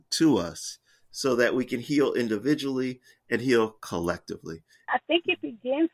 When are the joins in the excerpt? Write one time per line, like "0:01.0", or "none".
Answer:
0:04.9

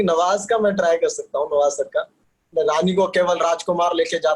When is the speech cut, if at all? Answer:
0:02.5

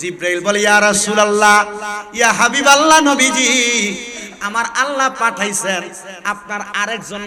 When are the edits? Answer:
none

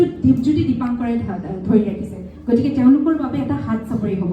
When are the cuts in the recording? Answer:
none

